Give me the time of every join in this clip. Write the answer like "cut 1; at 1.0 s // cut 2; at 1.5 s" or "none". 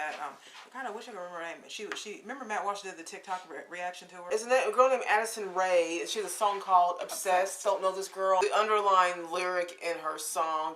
cut 1; at 4.3 s // cut 2; at 8.4 s